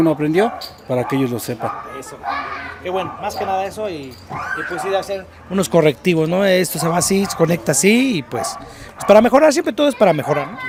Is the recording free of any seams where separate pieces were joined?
yes; 0 cuts

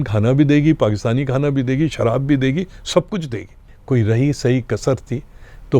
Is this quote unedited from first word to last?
no; 1 cut; at 3.7 s

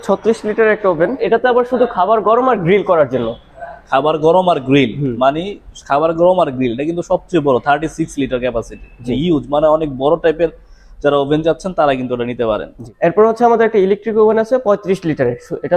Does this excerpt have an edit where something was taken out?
yes; 2 cuts; at 1.2 s, 12.9 s

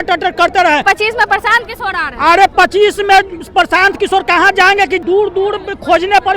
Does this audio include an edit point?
yes; 2 cuts; at 0.8 s, 5.0 s

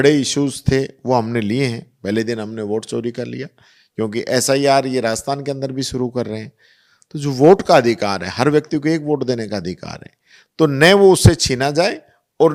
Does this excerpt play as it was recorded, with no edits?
yes; 0 cuts

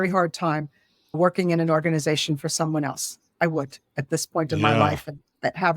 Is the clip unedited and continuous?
yes; 0 cuts

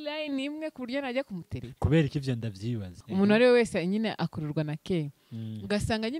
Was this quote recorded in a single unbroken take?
no; 1 cut; at 2.9 s

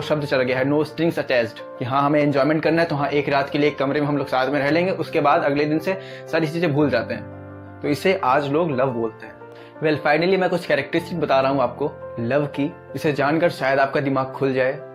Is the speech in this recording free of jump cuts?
yes; 0 cuts

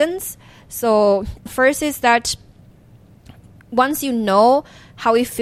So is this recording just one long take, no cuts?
no; 1 cut; at 1.4 s

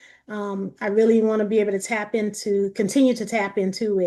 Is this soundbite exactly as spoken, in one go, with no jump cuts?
yes; 0 cuts

